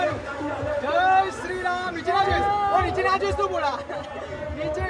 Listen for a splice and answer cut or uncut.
uncut